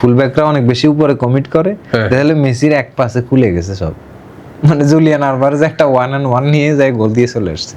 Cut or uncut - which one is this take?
uncut